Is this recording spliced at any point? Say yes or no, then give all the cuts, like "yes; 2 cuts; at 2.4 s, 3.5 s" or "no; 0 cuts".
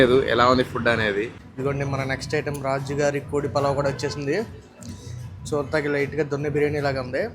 yes; 1 cut; at 1.4 s